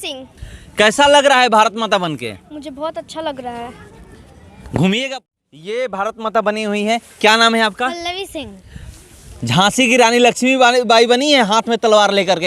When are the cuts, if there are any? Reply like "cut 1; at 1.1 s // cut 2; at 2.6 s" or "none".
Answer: cut 1; at 5.2 s